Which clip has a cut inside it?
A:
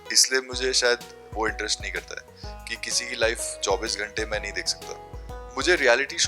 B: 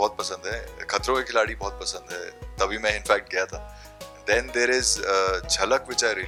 A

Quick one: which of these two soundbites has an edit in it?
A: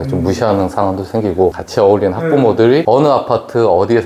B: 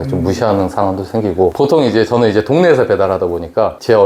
A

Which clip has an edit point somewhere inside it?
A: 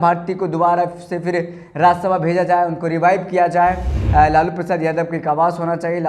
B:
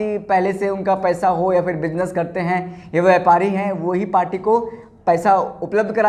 A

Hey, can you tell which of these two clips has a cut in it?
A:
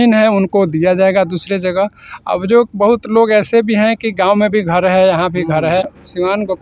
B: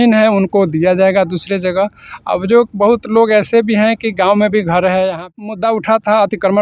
B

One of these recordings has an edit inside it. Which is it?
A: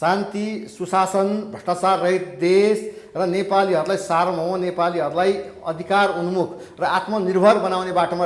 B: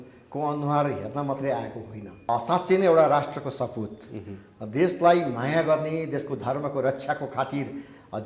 B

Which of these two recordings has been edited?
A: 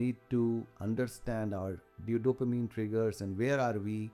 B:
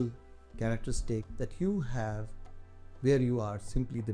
B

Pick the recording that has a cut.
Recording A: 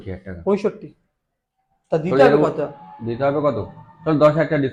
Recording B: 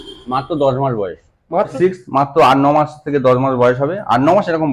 B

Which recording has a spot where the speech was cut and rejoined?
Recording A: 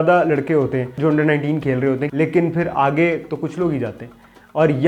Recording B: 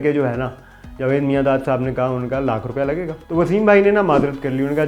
B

